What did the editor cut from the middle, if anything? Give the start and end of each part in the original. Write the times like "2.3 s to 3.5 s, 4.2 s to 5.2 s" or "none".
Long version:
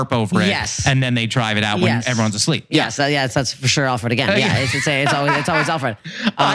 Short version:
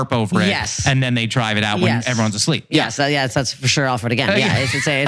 none

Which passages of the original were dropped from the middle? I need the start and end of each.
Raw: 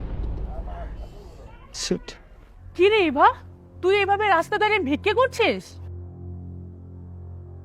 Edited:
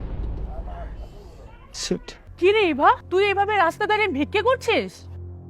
2.2 s to 2.6 s, 3.4 s to 3.8 s

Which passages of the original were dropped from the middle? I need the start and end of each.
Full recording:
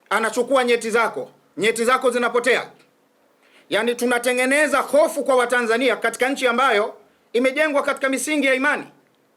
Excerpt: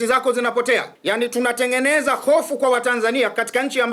2.7 s to 3.6 s

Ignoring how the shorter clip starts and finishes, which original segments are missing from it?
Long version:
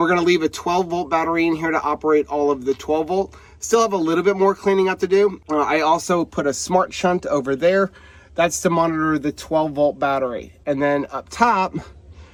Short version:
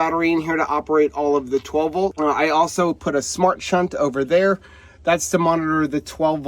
3.3 s to 5.5 s

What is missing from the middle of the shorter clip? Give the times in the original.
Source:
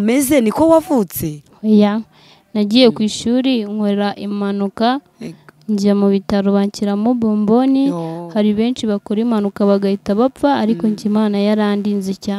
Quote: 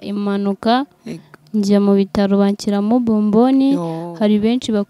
none

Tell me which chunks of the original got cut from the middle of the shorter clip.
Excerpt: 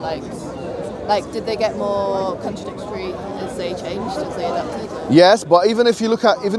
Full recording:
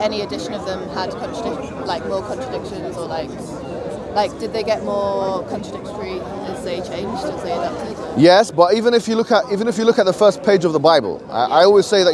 none

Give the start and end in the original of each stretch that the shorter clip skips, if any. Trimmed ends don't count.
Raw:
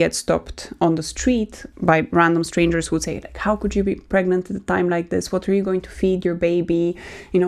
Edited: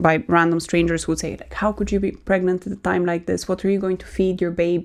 none

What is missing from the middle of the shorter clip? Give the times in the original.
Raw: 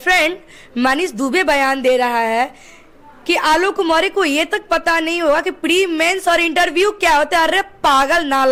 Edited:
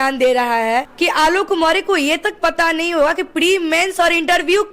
2.5 s to 3.2 s

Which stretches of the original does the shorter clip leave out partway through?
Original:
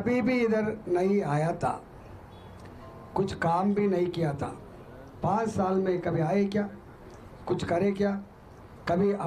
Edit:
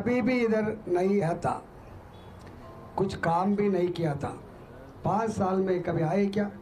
1.2 s to 1.4 s

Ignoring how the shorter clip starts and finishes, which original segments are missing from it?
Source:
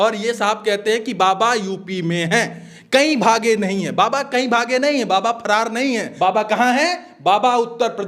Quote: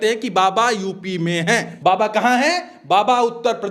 2.6 s to 6.1 s

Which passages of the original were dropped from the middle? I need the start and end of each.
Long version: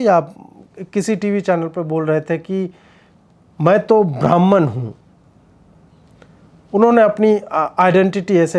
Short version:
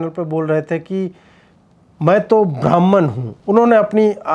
4.9 s to 6.5 s

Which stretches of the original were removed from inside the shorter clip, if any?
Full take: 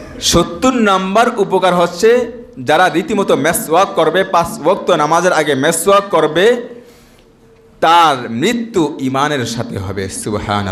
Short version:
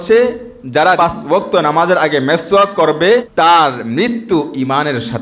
2.9 s to 4.3 s, 6.6 s to 7.7 s

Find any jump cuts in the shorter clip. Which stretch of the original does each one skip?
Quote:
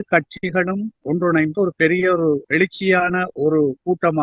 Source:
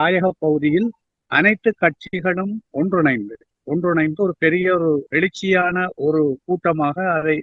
2.6 s to 3.5 s

